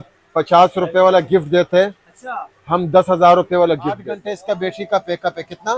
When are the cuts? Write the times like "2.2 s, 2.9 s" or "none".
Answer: 4.3 s